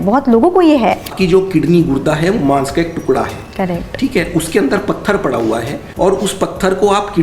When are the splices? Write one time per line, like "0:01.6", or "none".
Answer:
0:01.1
0:05.8